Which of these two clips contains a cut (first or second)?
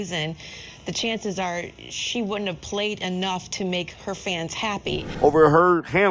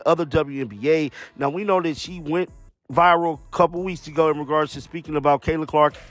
first